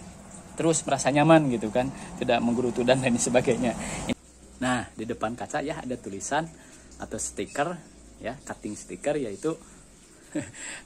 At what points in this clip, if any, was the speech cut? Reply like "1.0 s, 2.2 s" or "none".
4.1 s